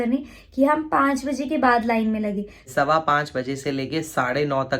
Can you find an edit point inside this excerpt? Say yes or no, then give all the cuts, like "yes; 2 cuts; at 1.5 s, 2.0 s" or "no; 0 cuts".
yes; 1 cut; at 2.7 s